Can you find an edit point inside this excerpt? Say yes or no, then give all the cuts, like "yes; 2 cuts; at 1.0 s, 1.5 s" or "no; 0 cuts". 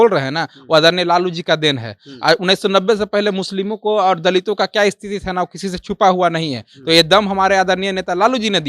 no; 0 cuts